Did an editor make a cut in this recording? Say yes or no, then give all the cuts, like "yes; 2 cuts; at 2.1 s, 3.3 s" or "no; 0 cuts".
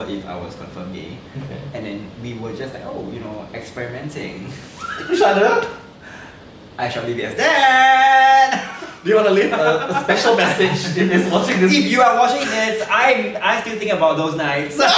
no; 0 cuts